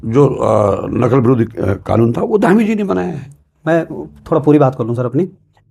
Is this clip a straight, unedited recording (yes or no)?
yes